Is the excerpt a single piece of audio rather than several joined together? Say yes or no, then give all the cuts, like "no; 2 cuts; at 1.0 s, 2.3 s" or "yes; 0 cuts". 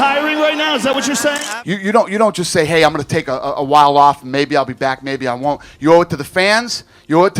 no; 1 cut; at 1.5 s